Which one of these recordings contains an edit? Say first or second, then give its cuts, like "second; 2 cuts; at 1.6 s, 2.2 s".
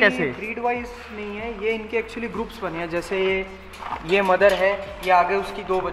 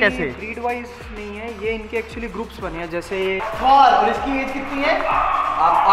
second; 1 cut; at 3.5 s